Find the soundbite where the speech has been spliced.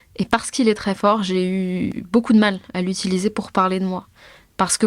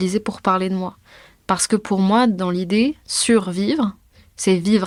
first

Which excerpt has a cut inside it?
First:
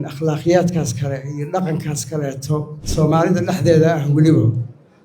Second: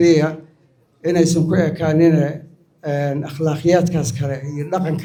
first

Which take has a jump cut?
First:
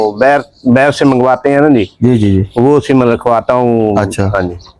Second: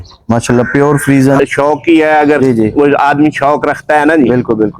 second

